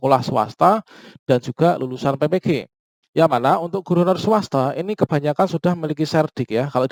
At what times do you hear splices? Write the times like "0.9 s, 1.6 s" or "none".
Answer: none